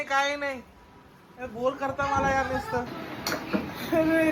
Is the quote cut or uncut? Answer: uncut